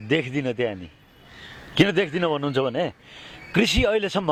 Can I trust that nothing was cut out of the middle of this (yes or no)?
yes